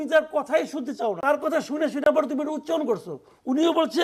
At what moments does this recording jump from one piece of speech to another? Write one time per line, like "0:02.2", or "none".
0:01.1